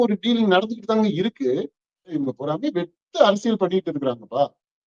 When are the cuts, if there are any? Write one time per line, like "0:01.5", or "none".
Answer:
0:02.2

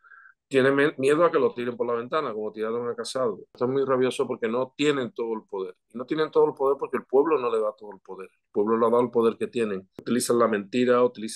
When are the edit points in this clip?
0:03.6
0:10.0

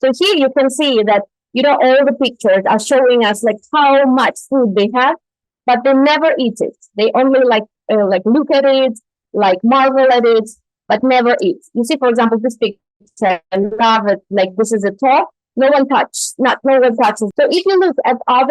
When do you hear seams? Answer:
0:17.2

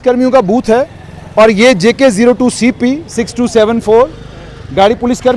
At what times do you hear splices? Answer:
none

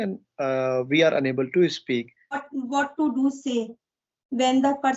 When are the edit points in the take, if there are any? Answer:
0:02.4

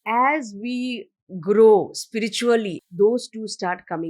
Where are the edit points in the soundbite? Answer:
0:02.8

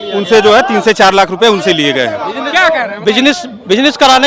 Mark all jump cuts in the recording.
none

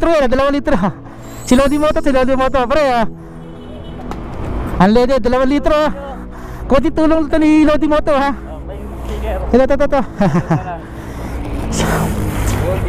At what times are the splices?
none

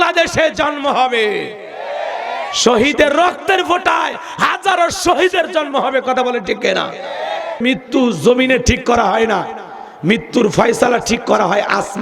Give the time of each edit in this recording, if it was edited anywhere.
0:07.6

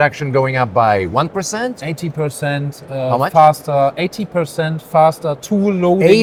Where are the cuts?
none

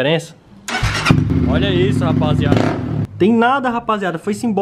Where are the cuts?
0:01.3
0:03.0

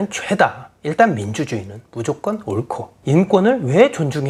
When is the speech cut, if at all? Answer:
none

